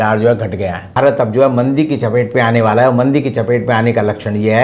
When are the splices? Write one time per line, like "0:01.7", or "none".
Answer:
0:00.9